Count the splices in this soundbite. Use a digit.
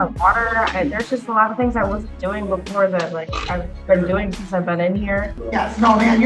1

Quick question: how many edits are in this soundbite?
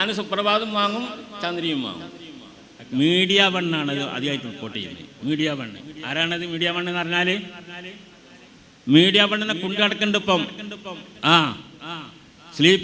1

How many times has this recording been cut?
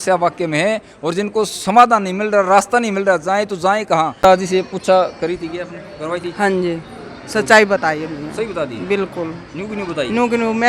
1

